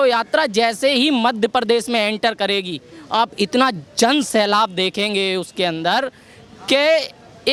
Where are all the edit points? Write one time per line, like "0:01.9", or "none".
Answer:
none